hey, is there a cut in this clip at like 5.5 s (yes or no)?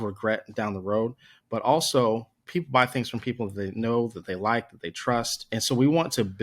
yes